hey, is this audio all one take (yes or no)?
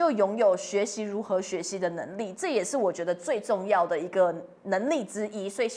yes